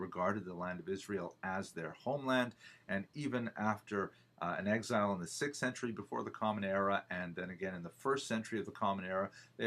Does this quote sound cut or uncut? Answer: cut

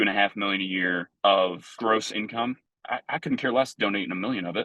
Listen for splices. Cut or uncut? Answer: cut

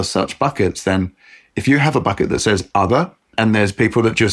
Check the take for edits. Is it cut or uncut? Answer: cut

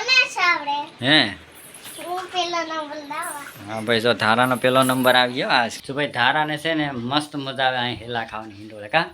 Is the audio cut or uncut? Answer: cut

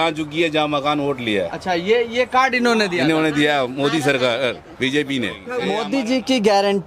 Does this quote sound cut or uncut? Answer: cut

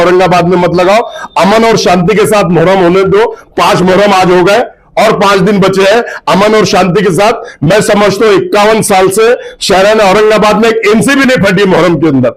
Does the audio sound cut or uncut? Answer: uncut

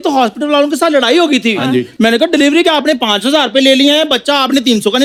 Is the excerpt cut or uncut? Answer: uncut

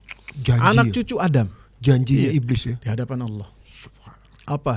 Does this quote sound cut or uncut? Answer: uncut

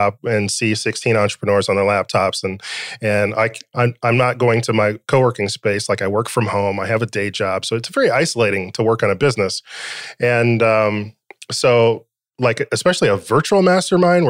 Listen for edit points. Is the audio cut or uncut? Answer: uncut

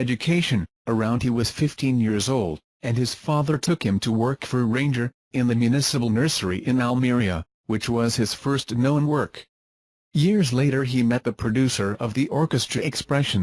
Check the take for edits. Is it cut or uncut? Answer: cut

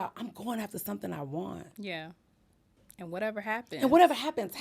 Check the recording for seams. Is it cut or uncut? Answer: uncut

